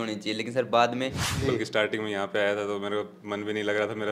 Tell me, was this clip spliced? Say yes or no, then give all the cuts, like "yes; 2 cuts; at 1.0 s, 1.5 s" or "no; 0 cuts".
yes; 1 cut; at 1.2 s